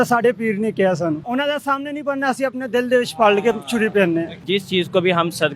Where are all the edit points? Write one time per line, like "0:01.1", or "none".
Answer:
0:01.2
0:04.4